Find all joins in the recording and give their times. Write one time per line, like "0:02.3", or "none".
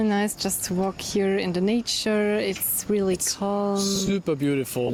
none